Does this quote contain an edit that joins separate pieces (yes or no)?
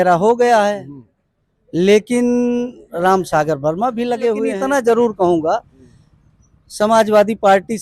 yes